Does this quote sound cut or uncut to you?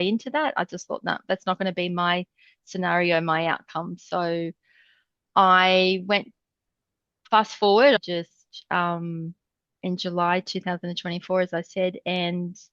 cut